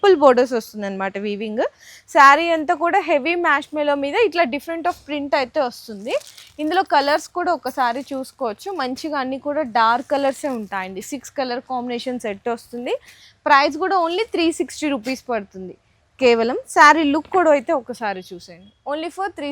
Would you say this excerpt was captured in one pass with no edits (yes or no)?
yes